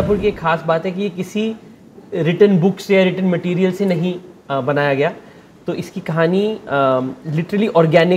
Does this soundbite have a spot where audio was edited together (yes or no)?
no